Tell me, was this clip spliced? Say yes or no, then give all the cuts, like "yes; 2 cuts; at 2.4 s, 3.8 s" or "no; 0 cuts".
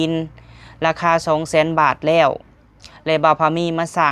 no; 0 cuts